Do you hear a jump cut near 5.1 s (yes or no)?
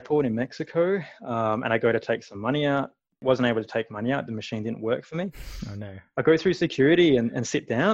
no